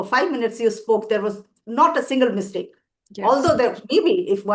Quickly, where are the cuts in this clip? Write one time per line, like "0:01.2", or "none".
none